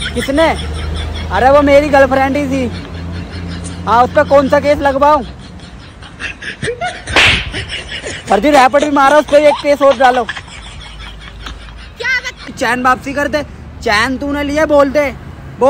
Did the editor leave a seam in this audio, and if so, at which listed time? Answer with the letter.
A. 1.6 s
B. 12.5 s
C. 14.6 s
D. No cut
B